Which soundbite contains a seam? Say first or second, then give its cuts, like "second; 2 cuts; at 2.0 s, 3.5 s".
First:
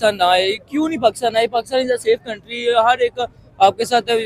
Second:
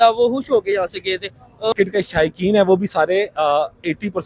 second; 1 cut; at 1.7 s